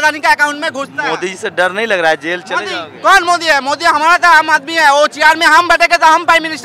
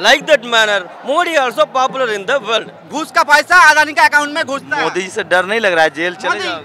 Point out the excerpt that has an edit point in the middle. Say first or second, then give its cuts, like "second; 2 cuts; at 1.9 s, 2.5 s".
second; 1 cut; at 2.8 s